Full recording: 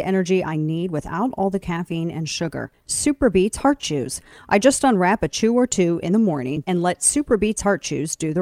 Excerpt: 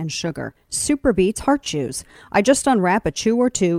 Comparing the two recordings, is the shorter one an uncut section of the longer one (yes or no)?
yes